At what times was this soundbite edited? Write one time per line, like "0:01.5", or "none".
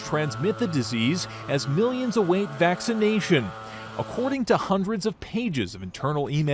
0:02.8